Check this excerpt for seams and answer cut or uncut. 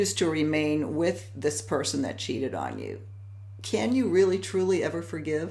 uncut